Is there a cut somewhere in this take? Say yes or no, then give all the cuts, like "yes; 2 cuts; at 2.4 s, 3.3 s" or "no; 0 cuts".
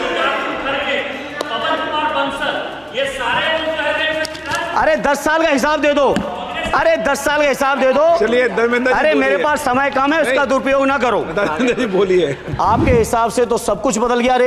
yes; 1 cut; at 12.4 s